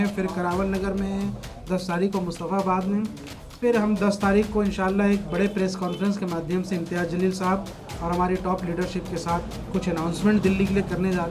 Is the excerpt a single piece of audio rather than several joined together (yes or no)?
yes